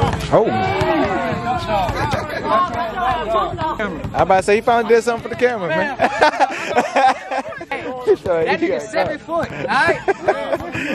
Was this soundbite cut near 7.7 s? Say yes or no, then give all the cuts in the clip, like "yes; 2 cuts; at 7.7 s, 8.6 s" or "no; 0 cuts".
yes; 2 cuts; at 3.8 s, 7.7 s